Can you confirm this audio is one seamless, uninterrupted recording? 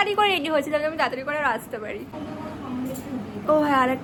yes; 0 cuts

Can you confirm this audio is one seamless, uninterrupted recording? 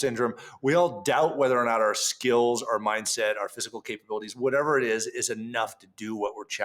yes; 0 cuts

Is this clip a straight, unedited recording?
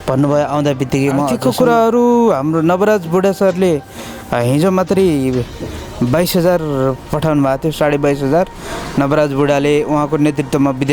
no; 1 cut; at 1.4 s

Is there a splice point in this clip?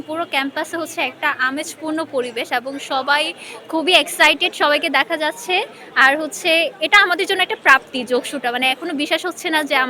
no; 0 cuts

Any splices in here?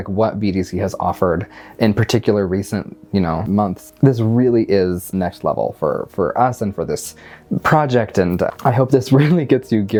no; 0 cuts

